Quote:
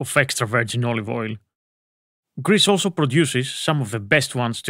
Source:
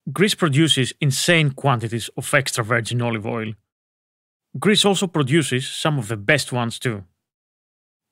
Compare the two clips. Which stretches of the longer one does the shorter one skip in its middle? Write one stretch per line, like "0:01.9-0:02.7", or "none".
none